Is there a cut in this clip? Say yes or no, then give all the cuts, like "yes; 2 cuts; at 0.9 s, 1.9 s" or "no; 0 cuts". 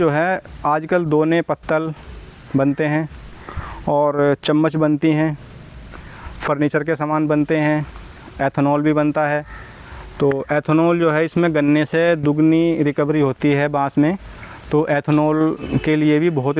no; 0 cuts